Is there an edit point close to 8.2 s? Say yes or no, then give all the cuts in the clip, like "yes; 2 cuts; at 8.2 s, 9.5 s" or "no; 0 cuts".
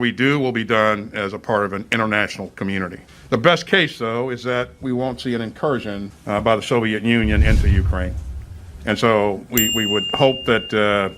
yes; 1 cut; at 8.2 s